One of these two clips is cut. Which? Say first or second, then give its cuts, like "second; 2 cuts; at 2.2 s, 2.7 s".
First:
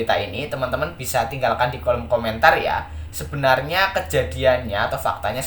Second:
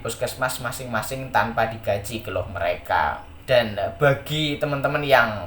second; 1 cut; at 3.3 s